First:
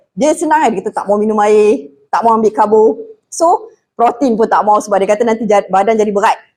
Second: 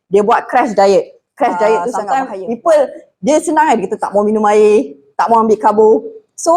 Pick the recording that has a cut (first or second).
second